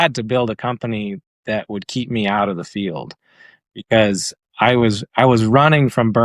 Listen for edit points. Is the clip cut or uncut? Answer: uncut